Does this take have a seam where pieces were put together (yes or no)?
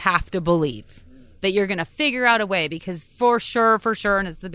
no